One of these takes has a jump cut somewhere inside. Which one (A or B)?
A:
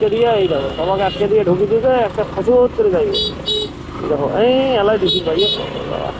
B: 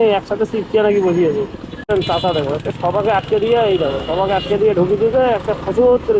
B